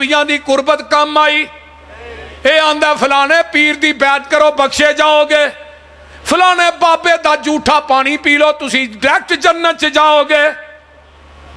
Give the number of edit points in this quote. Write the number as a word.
zero